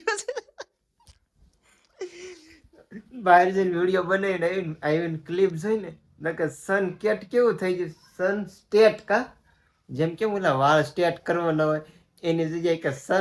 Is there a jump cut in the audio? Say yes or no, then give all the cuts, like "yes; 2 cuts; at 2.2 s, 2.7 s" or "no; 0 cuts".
no; 0 cuts